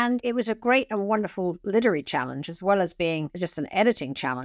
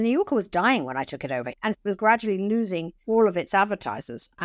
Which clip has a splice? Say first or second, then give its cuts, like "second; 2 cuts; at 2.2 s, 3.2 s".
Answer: second; 2 cuts; at 1.5 s, 2.9 s